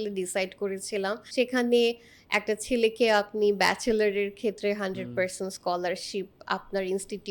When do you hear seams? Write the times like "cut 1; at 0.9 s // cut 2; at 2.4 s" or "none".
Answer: cut 1; at 1.2 s